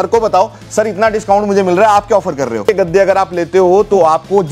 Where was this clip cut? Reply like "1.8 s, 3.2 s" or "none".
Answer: 2.6 s

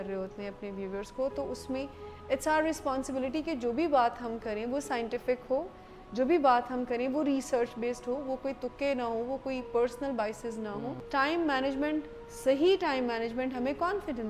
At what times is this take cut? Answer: 11.0 s

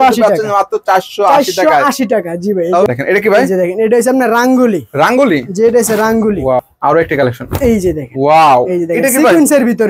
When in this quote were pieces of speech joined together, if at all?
2.9 s, 6.6 s

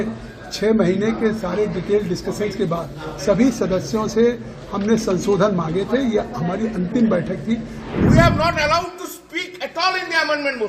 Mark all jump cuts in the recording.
7.8 s

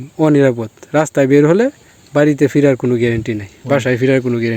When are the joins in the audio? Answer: none

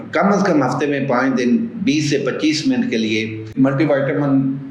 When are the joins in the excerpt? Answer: 3.5 s

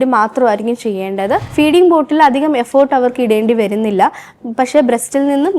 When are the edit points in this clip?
1.5 s

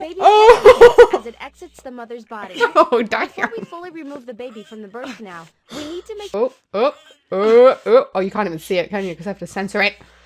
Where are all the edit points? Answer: 6.2 s

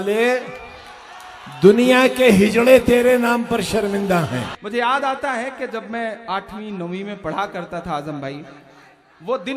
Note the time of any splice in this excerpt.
4.5 s

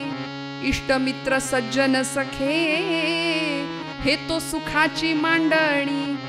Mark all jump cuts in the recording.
none

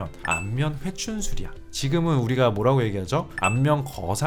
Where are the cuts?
none

